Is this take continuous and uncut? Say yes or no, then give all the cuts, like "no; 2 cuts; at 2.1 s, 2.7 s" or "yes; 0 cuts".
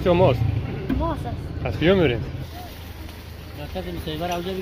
no; 1 cut; at 2.4 s